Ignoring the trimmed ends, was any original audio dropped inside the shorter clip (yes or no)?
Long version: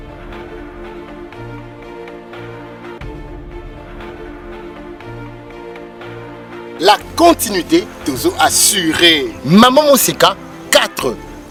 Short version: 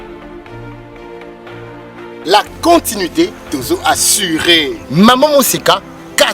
yes